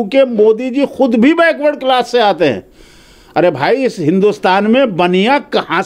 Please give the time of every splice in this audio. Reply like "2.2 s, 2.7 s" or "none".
none